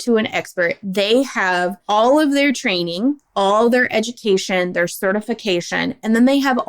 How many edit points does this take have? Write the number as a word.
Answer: one